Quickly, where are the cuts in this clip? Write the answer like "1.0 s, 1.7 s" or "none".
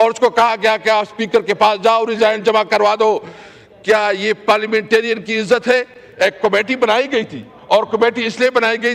none